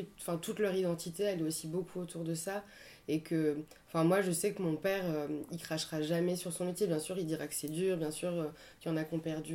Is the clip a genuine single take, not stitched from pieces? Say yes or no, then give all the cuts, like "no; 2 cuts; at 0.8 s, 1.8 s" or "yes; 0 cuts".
yes; 0 cuts